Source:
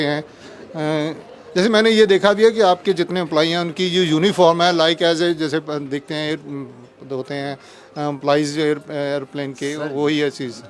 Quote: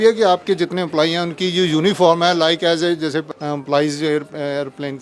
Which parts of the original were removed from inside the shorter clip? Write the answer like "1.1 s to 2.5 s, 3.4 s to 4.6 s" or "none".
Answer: 5.7 s to 7.9 s